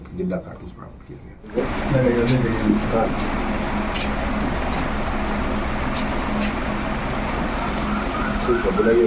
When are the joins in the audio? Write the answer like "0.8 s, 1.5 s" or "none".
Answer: none